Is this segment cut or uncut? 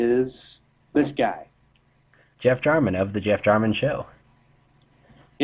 uncut